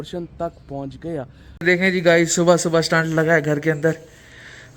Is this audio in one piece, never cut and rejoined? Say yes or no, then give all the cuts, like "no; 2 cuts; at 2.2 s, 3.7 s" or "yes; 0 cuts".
no; 1 cut; at 1.5 s